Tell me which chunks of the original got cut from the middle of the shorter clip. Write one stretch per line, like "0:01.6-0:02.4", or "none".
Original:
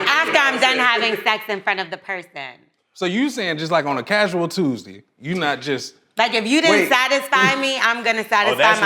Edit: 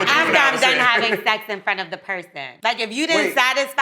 0:02.4-0:06.0

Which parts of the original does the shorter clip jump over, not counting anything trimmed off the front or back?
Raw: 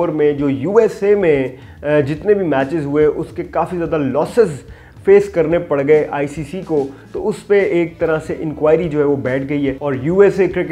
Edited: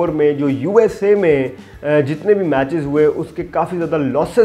none

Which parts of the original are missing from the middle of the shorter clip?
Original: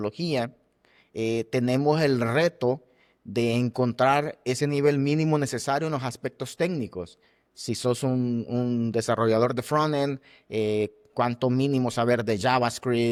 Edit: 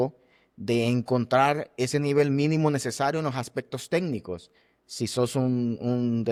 none

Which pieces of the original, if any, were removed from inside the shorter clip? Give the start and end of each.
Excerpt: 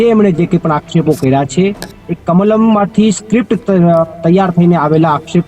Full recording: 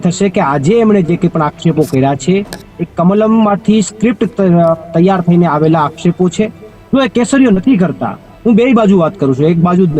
none

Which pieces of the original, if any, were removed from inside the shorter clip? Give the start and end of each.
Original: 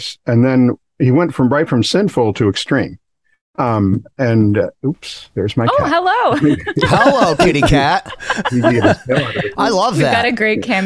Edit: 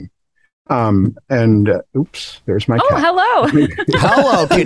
none

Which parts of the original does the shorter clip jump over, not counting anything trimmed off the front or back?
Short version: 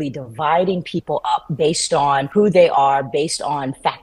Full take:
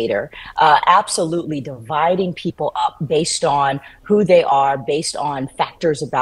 0:03.8-0:04.0

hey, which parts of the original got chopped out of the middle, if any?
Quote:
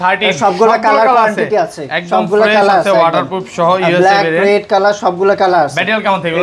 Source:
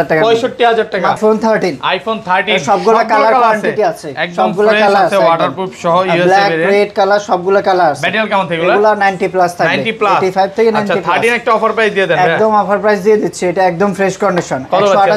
none

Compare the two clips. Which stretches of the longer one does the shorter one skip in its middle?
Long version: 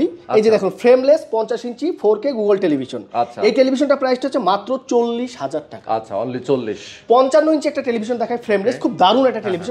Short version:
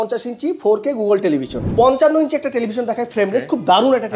0:03.0-0:06.9

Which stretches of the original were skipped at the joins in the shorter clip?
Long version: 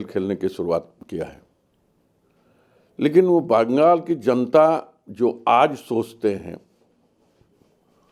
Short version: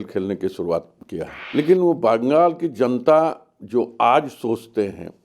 0:01.4-0:02.9

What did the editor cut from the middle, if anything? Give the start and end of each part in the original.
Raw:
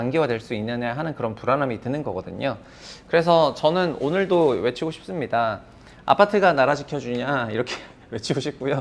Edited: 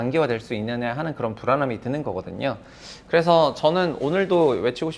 none

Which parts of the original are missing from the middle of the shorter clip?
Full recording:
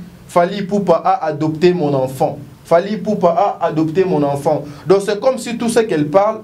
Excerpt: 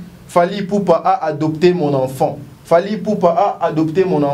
none

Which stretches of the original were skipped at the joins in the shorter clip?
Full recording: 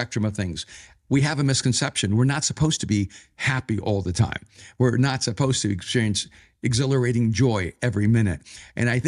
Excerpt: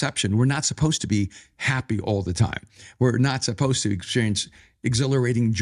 none

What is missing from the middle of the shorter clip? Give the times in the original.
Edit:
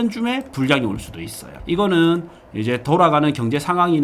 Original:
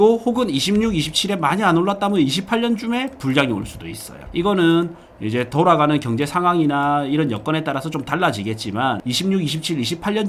none

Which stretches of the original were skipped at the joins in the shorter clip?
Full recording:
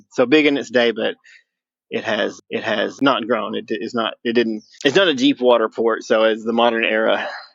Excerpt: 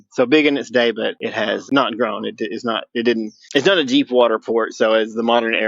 0:01.6-0:02.9

